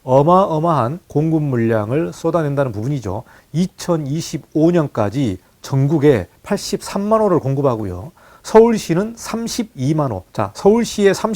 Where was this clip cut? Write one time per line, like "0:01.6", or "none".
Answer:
0:01.0
0:06.3
0:10.2